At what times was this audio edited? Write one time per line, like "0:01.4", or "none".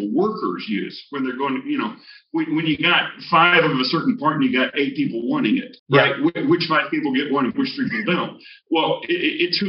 0:05.7